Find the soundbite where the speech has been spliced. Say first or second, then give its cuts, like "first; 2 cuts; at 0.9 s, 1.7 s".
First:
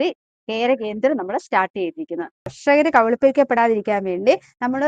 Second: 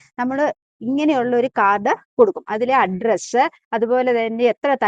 first; 1 cut; at 2.6 s